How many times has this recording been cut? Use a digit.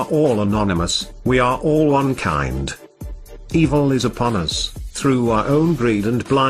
1